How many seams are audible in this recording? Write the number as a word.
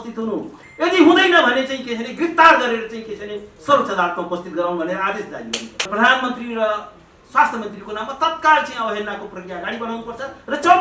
one